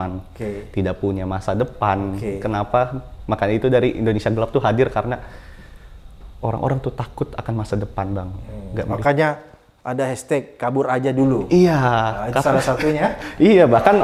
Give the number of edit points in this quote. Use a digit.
0